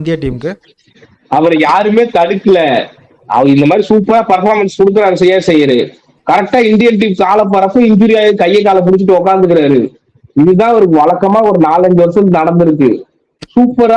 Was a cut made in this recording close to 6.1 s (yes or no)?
no